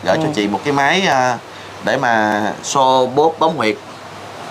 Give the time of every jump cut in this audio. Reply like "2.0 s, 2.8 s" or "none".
none